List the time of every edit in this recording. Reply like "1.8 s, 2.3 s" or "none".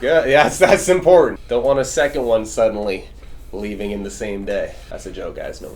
1.4 s, 4.8 s

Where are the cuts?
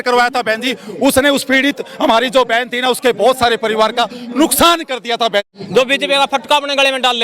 5.6 s

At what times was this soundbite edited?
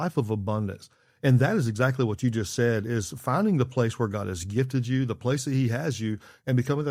none

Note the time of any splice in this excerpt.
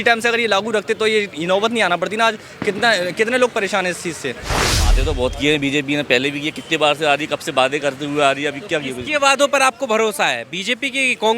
4.8 s

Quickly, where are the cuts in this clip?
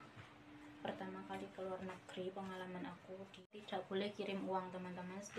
3.5 s

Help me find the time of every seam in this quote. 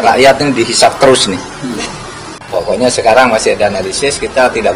2.4 s

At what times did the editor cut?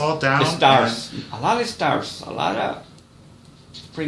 1.0 s

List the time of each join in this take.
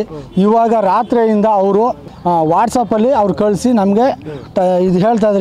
2.1 s

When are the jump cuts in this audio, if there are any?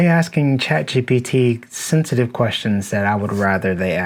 none

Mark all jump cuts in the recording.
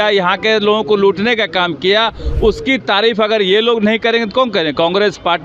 none

